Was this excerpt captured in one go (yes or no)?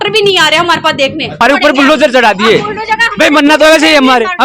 no